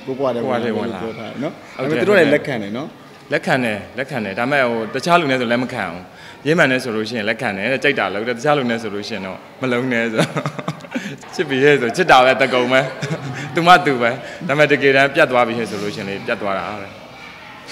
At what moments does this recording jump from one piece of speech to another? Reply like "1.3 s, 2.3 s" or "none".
11.1 s